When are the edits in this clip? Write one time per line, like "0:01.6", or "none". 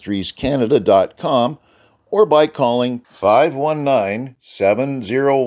none